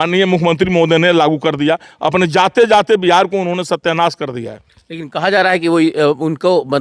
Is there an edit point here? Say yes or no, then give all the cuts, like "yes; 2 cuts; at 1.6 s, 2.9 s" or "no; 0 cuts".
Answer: no; 0 cuts